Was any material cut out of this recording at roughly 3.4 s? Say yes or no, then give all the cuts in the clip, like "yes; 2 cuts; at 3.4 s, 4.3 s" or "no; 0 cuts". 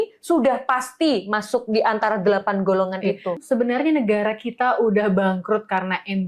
yes; 1 cut; at 3.4 s